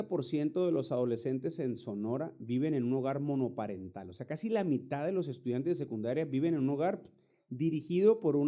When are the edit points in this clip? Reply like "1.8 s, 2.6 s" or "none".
none